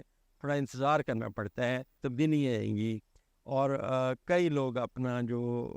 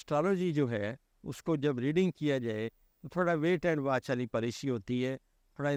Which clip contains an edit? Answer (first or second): first